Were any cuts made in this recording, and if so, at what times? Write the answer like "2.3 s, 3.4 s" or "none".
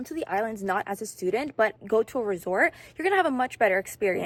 none